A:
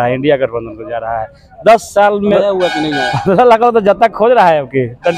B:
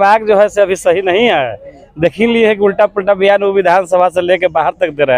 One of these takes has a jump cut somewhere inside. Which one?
A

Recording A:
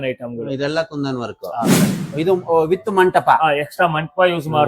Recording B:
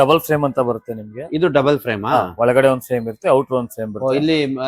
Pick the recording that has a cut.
A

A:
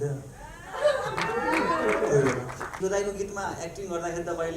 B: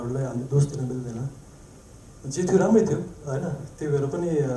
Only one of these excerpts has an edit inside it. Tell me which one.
A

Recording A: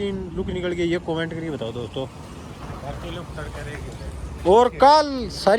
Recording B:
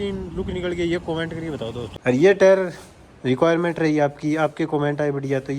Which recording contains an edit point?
B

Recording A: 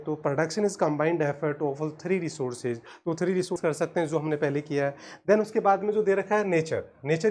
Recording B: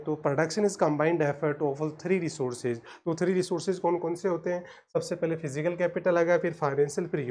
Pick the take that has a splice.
A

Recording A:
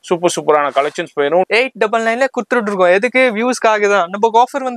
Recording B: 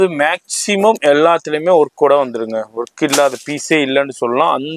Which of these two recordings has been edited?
A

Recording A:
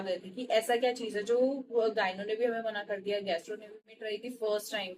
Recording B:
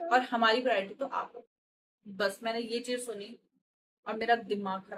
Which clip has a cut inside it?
A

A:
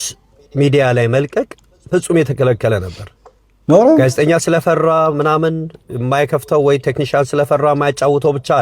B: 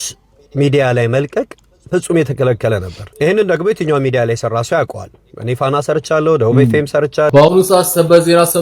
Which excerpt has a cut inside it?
B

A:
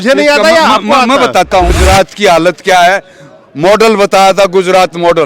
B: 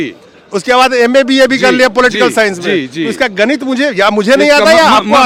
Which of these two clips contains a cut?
A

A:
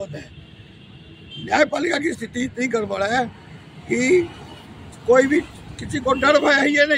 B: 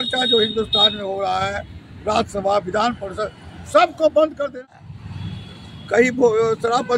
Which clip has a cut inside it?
B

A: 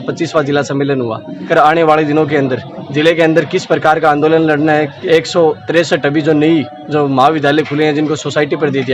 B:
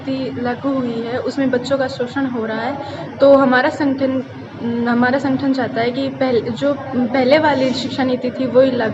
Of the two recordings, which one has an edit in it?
A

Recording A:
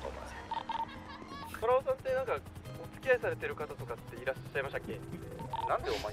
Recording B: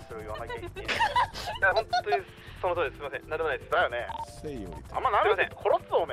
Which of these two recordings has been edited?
A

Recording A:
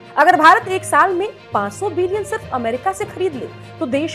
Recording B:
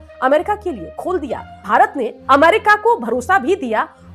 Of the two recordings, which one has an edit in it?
B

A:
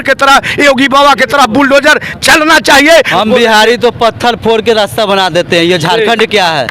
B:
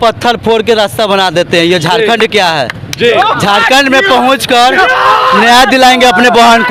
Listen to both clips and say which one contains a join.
A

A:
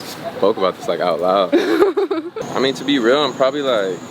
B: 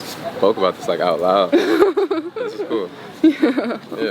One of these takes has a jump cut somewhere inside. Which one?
A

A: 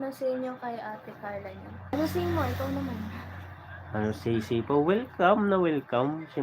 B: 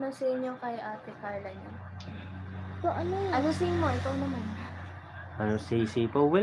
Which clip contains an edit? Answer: A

